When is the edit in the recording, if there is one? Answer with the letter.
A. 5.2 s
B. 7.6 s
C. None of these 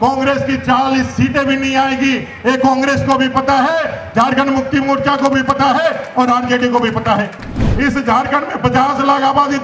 B